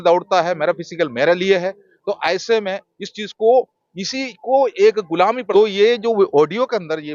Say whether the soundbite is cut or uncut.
cut